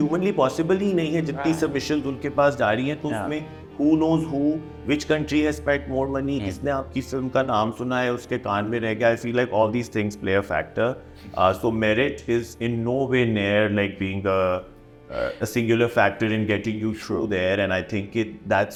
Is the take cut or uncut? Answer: uncut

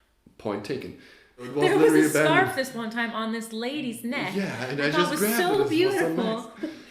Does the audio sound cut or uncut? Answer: cut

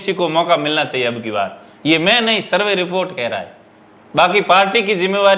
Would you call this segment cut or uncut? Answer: uncut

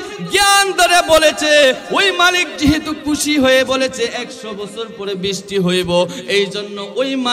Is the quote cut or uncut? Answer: uncut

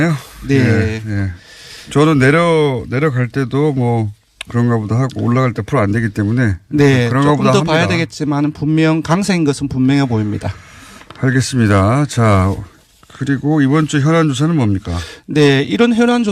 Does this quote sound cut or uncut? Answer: uncut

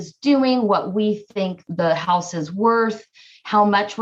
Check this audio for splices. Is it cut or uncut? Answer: uncut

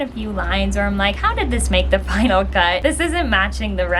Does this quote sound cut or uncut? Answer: uncut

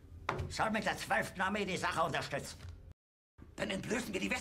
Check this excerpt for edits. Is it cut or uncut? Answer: cut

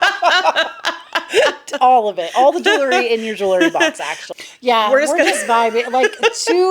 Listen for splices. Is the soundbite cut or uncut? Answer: cut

